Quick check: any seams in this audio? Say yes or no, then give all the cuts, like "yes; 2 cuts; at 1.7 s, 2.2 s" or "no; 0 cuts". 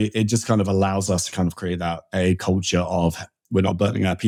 no; 0 cuts